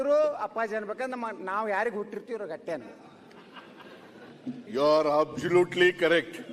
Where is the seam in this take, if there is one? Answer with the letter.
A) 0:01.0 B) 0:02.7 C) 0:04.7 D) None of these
C